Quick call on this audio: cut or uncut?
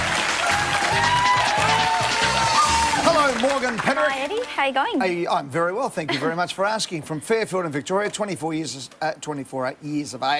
cut